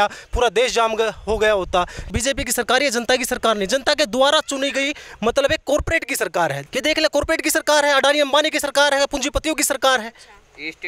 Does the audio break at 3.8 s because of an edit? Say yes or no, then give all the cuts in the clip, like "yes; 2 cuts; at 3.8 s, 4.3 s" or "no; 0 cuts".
no; 2 cuts; at 2.1 s, 6.6 s